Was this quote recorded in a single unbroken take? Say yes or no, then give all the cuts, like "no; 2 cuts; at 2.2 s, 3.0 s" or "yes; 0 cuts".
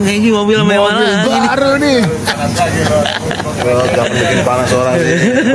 yes; 0 cuts